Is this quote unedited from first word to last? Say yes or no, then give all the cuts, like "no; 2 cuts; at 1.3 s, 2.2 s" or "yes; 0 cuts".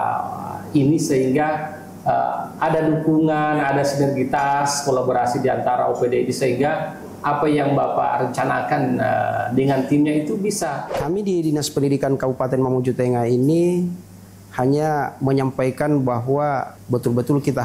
no; 2 cuts; at 10.9 s, 16.7 s